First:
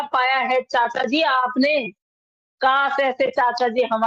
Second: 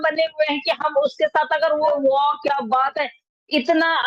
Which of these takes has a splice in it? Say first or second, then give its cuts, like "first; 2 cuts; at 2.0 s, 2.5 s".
second; 1 cut; at 1.9 s